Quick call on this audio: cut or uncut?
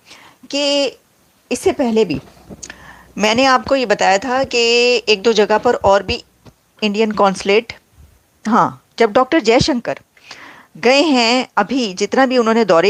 uncut